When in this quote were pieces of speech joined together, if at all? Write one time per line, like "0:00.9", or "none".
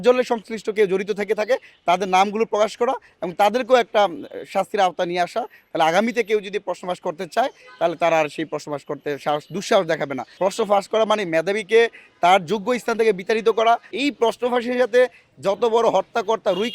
0:10.2
0:13.9